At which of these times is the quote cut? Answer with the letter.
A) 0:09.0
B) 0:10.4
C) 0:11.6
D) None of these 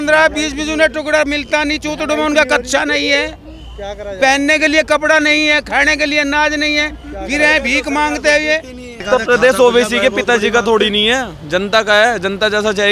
A